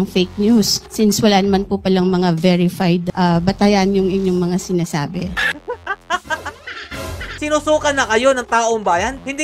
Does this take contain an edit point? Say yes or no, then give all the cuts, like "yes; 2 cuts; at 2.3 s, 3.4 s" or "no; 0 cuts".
yes; 1 cut; at 7.4 s